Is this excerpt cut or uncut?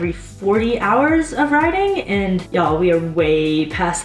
cut